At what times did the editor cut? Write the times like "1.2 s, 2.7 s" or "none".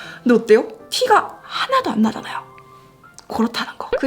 none